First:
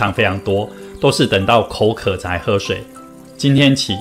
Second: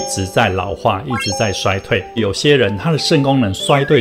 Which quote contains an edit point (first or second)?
second